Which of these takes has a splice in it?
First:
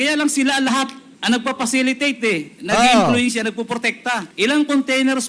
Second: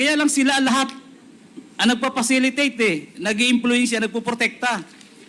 first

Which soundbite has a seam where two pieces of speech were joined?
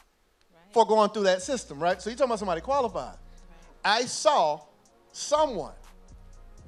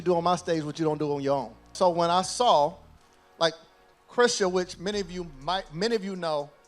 second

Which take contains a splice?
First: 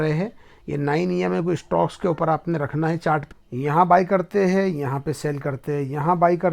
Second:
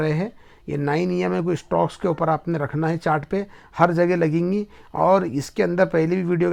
first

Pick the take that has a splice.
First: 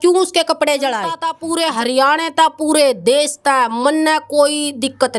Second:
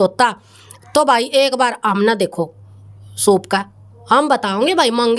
first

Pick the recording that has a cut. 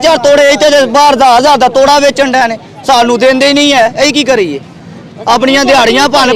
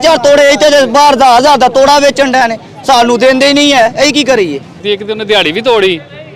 second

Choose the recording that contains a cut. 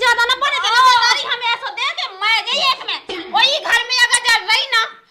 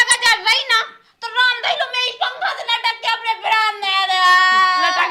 first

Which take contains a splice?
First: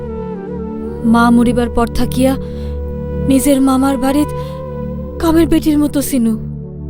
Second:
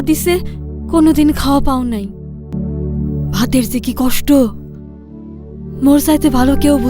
second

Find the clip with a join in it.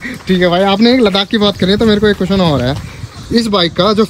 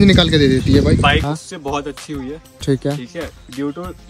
second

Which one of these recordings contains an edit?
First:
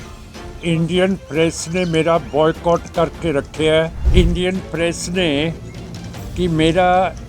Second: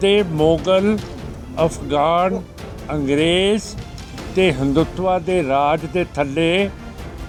first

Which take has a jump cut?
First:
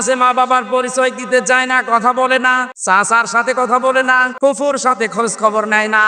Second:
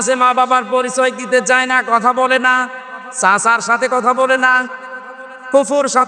first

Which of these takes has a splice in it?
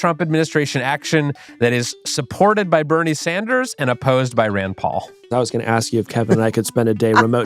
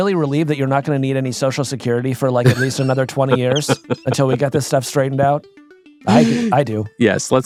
first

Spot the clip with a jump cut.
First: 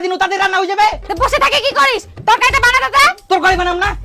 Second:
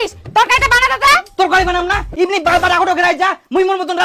first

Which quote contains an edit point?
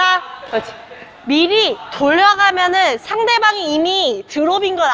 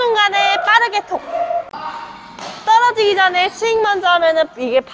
second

